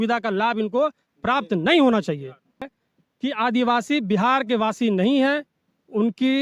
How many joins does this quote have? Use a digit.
1